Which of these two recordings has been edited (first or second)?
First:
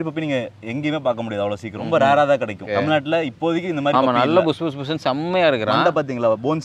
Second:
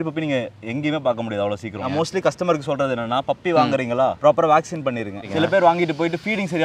second